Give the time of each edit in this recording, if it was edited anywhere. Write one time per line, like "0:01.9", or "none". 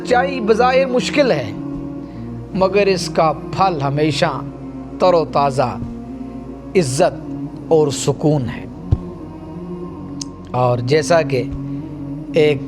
0:09.1
0:10.5